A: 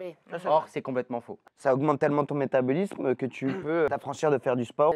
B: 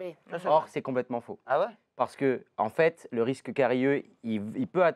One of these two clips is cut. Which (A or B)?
A